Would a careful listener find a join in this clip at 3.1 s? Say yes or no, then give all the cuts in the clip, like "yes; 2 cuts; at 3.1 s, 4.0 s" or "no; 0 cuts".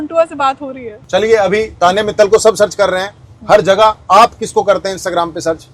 no; 1 cut; at 0.9 s